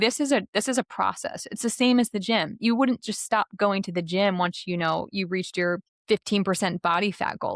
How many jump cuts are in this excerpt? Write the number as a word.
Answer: one